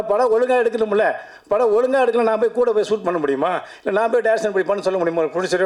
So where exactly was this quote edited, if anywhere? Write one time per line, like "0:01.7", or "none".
none